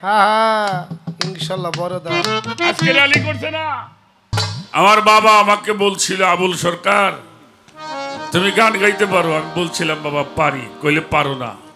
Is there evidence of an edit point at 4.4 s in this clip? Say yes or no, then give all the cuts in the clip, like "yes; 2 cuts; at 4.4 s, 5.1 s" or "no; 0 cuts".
yes; 1 cut; at 4.4 s